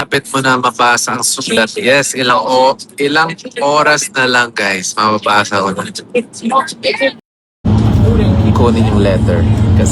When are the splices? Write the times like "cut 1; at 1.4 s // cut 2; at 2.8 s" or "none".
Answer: cut 1; at 7.6 s